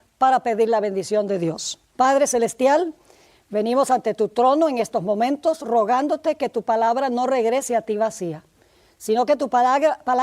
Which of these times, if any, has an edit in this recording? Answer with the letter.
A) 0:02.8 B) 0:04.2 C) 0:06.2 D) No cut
C